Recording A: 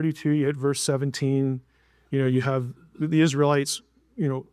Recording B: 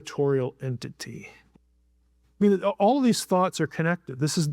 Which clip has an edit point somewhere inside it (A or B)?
B